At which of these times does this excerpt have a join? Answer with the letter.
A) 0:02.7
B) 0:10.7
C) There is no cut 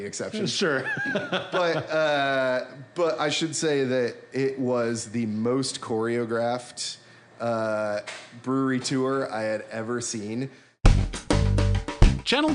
B